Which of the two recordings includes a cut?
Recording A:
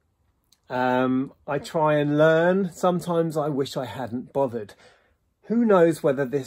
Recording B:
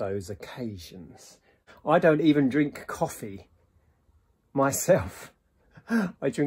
B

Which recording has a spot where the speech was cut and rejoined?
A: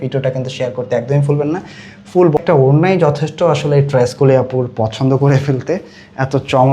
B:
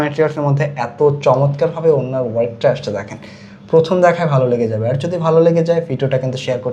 A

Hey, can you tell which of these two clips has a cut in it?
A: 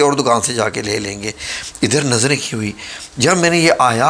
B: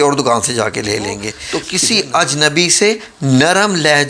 B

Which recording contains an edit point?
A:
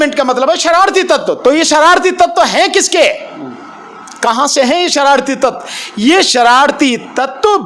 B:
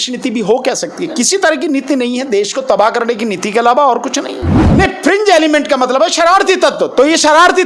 B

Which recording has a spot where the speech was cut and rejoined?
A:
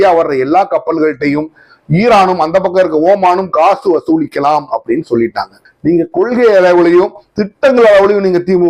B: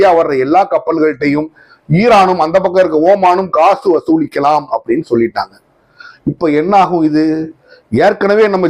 A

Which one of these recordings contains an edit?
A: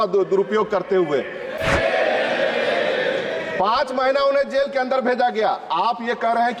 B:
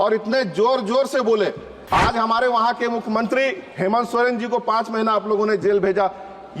B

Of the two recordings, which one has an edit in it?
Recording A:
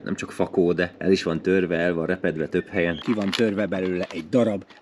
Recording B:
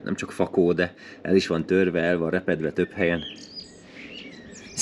A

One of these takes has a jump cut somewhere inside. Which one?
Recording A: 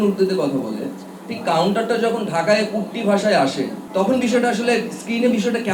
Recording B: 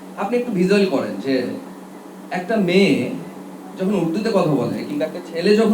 A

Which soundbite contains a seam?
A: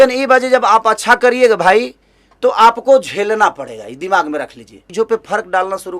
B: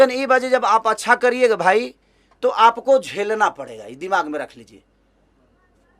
A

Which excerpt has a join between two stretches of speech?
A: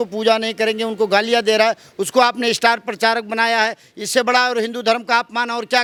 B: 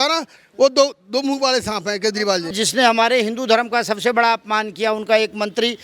B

